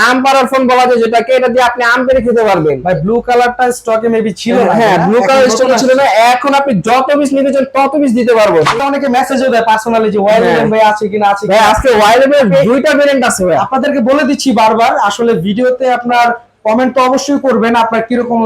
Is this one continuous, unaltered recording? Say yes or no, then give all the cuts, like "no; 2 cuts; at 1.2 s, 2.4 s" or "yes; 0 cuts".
no; 1 cut; at 8.8 s